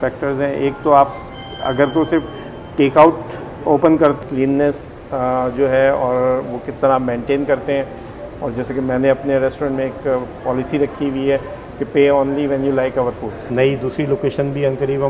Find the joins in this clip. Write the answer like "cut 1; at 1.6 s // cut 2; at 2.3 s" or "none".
cut 1; at 4.2 s // cut 2; at 13.4 s